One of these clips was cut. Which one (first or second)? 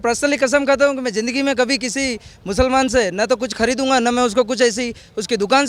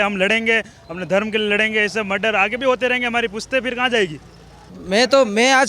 second